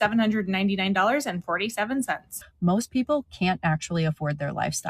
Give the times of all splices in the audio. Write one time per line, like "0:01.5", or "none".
0:02.5